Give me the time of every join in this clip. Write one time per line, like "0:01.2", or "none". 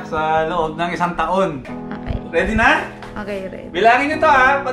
0:01.7